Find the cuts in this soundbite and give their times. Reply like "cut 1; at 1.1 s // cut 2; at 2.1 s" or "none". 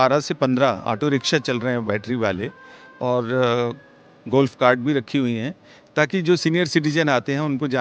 none